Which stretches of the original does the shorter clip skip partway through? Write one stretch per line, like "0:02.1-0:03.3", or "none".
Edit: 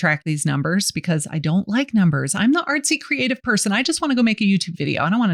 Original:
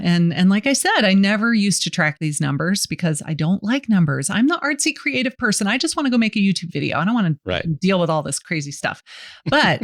none